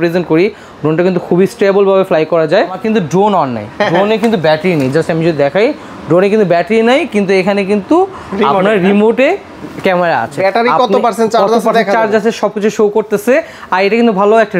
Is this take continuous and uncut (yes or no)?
no